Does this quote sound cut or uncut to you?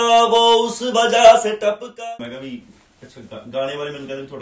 cut